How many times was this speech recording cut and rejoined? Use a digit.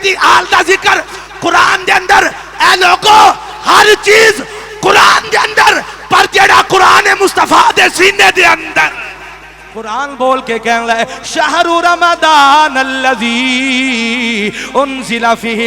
1